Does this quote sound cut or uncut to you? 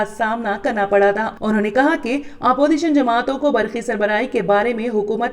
cut